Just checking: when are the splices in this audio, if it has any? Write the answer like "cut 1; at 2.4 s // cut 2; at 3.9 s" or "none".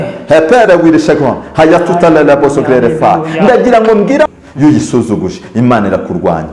cut 1; at 4.3 s